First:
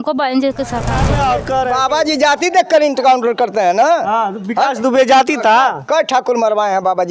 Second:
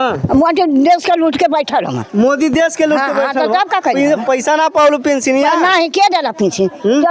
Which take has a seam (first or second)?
first